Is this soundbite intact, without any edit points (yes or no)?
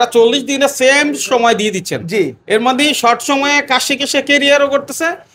yes